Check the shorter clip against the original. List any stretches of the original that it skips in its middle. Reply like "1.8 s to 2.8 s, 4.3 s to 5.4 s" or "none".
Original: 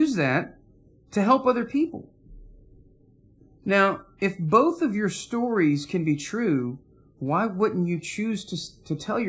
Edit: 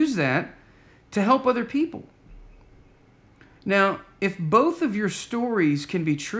none